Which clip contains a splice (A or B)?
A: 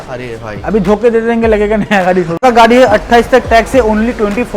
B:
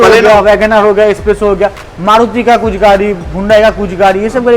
A